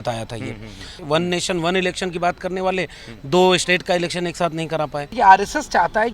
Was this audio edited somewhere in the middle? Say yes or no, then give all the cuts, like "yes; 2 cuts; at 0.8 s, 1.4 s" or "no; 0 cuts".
yes; 2 cuts; at 1.0 s, 5.1 s